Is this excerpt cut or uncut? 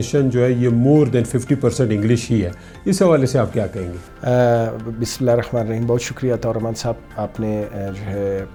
uncut